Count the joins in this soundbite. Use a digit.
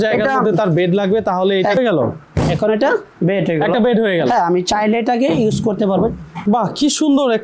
2